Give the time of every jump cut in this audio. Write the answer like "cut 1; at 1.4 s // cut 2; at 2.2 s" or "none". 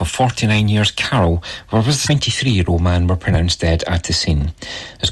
cut 1; at 2.0 s

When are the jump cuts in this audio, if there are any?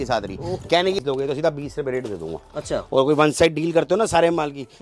cut 1; at 1.0 s

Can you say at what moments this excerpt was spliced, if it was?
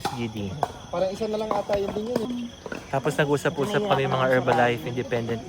cut 1; at 2.3 s

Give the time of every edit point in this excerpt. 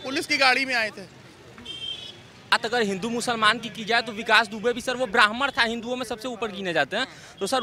cut 1; at 2.6 s

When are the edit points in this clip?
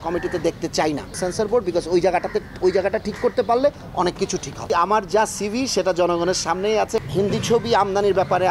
cut 1; at 1.2 s // cut 2; at 4.6 s // cut 3; at 7.0 s

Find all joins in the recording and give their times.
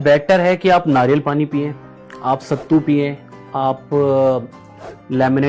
none

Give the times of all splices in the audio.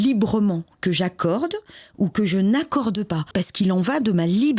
cut 1; at 3.3 s

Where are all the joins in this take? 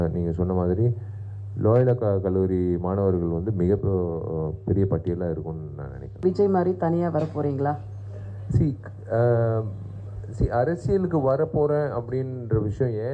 cut 1; at 6.2 s

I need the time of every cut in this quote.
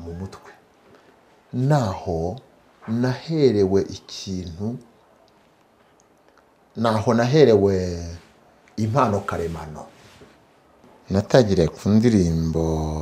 cut 1; at 10.9 s

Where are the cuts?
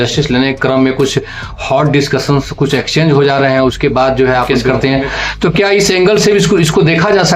cut 1; at 4.5 s

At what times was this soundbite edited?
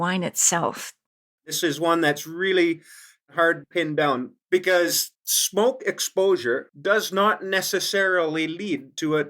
cut 1; at 1.6 s // cut 2; at 3.3 s

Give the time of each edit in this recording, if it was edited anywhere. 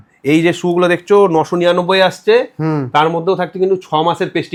none

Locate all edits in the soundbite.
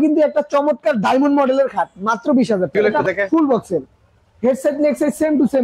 cut 1; at 2.7 s

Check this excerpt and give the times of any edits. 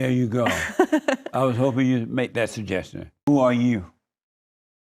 cut 1; at 3.2 s

